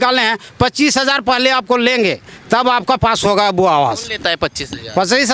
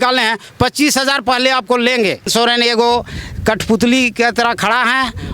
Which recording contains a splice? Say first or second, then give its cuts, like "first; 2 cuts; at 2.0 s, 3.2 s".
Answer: second; 1 cut; at 2.3 s